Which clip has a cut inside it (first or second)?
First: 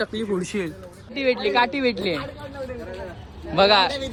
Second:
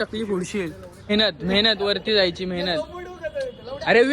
second